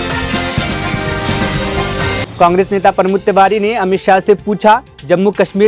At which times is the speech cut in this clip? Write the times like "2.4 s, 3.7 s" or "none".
2.3 s